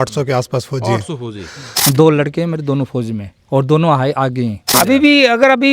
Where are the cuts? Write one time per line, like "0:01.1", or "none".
0:01.8
0:04.7